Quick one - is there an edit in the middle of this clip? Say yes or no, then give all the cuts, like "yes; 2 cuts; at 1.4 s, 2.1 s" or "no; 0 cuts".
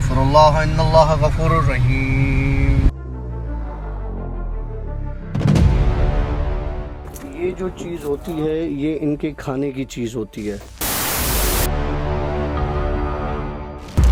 no; 0 cuts